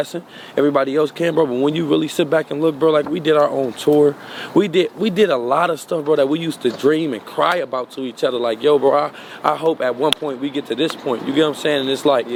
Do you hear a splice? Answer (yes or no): no